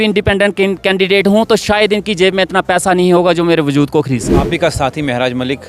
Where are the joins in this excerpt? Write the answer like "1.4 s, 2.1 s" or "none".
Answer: 4.4 s